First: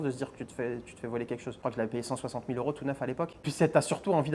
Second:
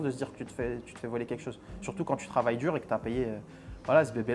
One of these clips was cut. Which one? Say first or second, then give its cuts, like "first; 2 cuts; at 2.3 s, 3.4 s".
first; 1 cut; at 1.6 s